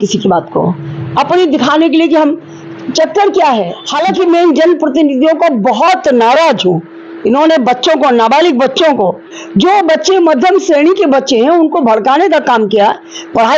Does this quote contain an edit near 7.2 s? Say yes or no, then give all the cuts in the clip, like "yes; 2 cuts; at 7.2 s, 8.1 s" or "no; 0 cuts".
no; 1 cut; at 3.8 s